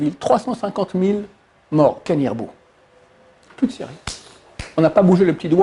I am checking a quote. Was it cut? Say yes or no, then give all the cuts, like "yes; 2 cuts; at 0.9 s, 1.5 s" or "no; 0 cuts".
no; 0 cuts